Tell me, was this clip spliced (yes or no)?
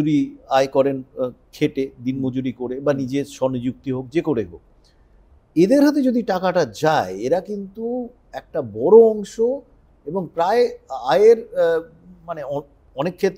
no